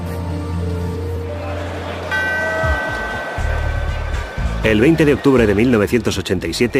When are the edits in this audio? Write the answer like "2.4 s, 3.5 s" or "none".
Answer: none